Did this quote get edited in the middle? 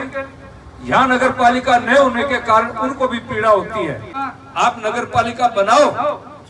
yes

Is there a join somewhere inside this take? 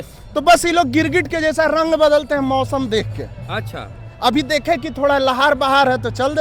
no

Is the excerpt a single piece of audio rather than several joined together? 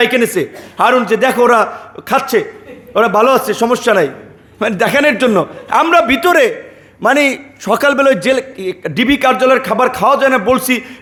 yes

